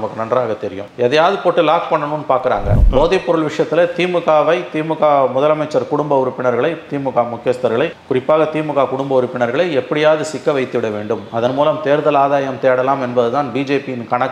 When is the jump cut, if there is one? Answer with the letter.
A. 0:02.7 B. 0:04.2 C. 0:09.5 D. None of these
A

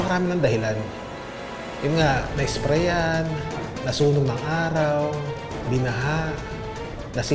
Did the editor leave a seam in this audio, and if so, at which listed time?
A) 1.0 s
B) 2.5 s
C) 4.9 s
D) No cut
D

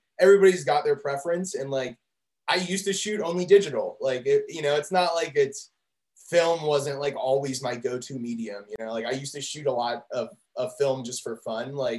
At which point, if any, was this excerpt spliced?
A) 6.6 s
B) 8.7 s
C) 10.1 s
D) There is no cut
B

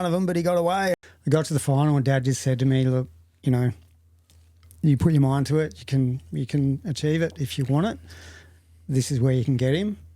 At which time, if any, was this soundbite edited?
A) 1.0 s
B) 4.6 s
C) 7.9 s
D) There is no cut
A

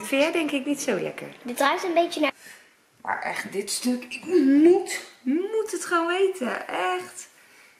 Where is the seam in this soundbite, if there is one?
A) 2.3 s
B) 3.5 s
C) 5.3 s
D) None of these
A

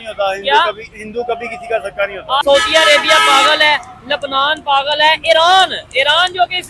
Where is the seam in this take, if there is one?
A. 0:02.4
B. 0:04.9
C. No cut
A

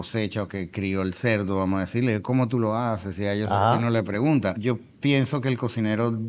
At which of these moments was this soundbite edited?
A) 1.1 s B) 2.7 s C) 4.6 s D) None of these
C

